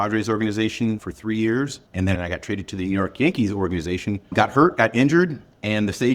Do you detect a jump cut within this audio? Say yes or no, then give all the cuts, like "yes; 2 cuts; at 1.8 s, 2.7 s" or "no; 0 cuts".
yes; 2 cuts; at 1.8 s, 4.3 s